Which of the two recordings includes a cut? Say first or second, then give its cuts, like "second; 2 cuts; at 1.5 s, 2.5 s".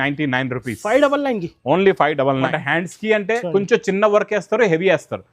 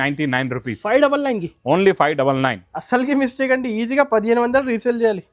first; 1 cut; at 2.6 s